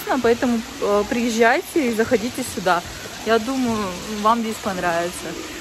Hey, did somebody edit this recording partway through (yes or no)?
no